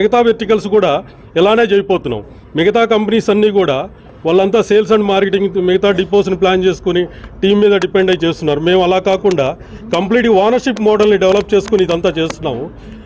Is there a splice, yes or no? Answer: no